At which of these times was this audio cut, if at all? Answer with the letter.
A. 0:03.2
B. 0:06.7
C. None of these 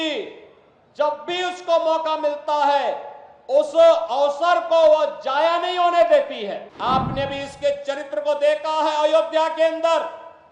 B